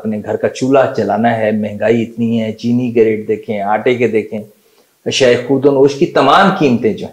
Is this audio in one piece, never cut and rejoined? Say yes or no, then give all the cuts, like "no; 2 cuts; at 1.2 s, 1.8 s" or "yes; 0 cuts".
yes; 0 cuts